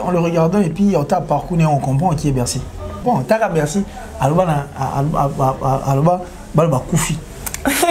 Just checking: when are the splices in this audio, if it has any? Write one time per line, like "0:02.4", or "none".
0:03.0